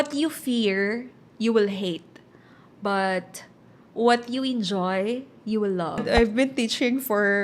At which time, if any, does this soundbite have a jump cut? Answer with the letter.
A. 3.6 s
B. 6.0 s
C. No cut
B